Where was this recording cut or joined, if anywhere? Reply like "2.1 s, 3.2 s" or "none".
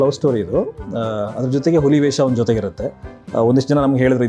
none